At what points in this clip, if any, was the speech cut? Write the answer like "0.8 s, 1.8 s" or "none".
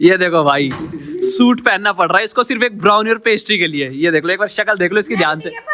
none